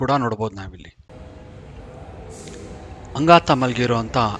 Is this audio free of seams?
no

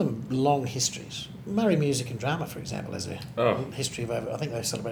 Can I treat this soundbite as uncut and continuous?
yes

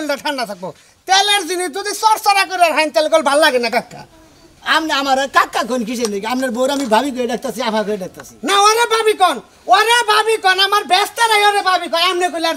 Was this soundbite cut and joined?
no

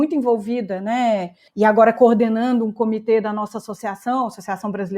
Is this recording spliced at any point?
yes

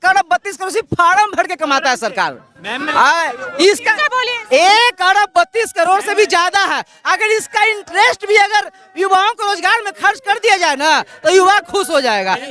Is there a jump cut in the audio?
no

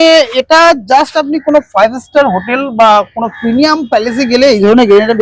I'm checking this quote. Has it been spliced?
no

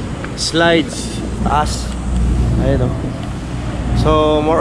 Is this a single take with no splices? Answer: yes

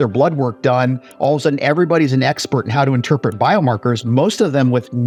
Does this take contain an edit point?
no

